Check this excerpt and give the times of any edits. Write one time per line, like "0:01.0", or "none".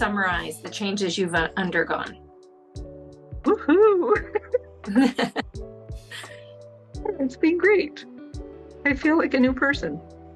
none